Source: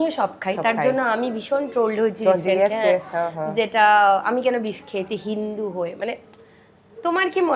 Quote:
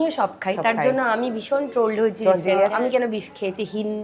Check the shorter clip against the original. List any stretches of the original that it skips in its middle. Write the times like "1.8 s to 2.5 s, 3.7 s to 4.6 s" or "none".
2.7 s to 4.3 s